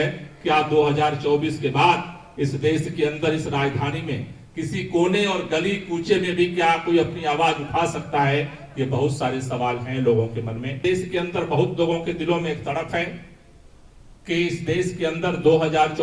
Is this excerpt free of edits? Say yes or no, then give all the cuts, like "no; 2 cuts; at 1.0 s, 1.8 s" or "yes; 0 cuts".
no; 1 cut; at 10.8 s